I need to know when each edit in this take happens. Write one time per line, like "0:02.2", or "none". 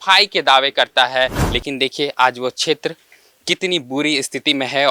0:01.5